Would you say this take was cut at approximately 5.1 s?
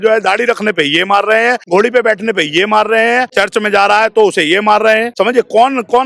yes; 3 cuts; at 1.6 s, 3.3 s, 5.1 s

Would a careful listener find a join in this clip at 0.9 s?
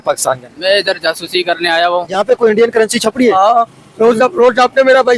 no; 1 cut; at 2.2 s

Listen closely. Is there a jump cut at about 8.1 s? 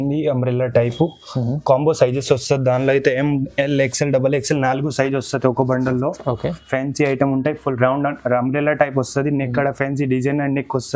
no; 0 cuts

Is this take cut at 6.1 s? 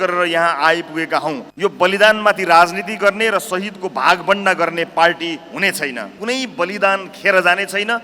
yes; 2 cuts; at 1.5 s, 6.1 s

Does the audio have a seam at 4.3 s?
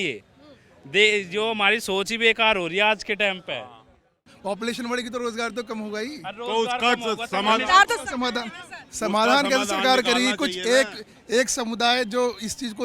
yes; 1 cut; at 4.3 s

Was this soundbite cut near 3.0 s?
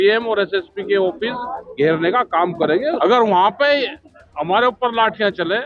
yes; 1 cut; at 3.0 s

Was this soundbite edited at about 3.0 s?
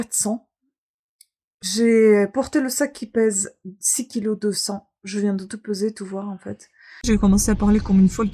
no; 1 cut; at 7.0 s

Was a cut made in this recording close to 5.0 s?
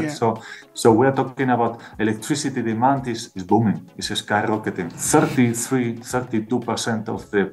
yes; 1 cut; at 5.0 s

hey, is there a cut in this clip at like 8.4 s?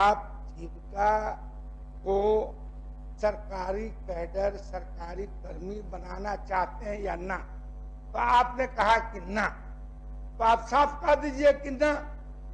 no; 0 cuts

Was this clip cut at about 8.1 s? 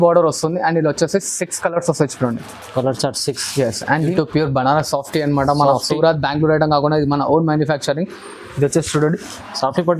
no; 1 cut; at 4.1 s

